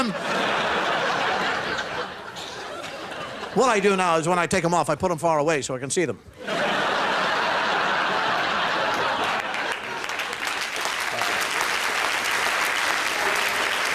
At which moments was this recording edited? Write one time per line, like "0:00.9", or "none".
0:06.3